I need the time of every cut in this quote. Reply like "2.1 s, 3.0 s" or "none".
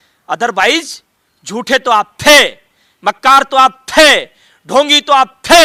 none